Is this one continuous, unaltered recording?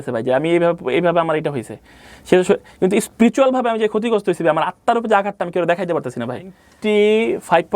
no; 1 cut; at 6.6 s

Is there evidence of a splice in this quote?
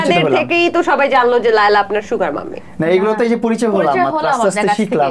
no; 0 cuts

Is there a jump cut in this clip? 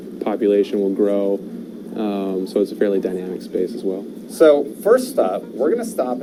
no; 0 cuts

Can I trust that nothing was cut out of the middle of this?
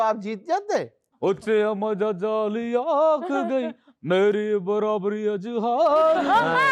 no; 1 cut; at 1.0 s

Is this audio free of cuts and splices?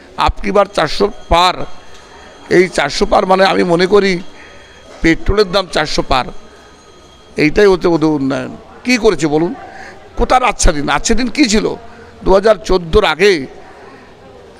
yes; 0 cuts

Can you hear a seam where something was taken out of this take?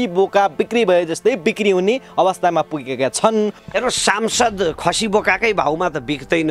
yes; 1 cut; at 3.6 s

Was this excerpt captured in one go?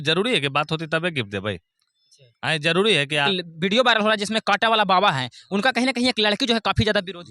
no; 1 cut; at 3.3 s

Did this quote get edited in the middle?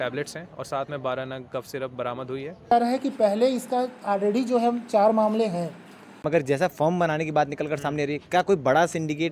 yes; 2 cuts; at 2.7 s, 6.1 s

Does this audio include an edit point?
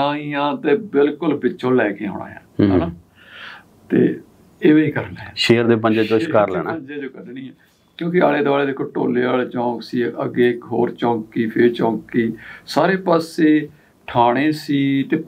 no; 0 cuts

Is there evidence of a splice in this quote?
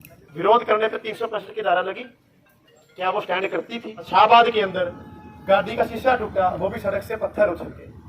yes; 1 cut; at 4.1 s

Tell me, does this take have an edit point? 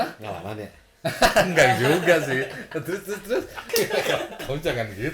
yes; 1 cut; at 3.6 s

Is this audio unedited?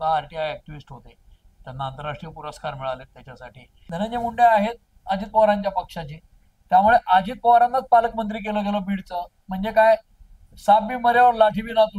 no; 1 cut; at 3.8 s

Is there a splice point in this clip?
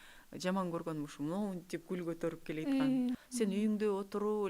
yes; 1 cut; at 3.2 s

